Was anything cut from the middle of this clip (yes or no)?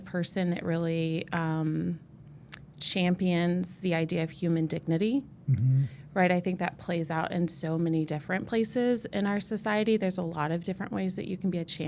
no